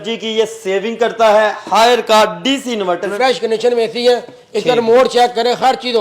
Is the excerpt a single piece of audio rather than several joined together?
no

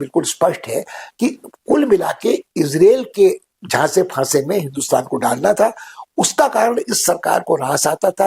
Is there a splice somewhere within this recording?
no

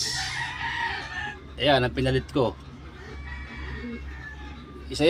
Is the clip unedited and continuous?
no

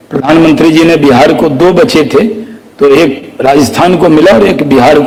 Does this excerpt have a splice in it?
no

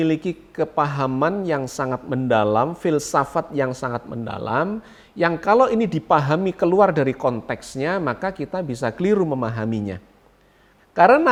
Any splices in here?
no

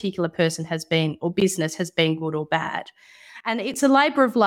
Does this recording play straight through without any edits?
no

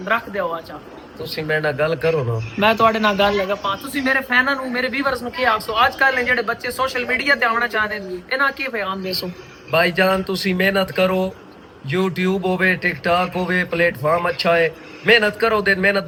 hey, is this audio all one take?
yes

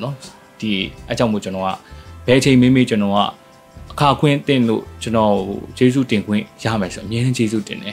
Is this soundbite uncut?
yes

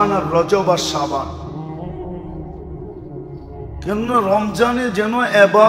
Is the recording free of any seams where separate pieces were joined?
no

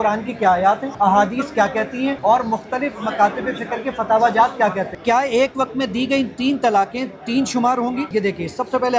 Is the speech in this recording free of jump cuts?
no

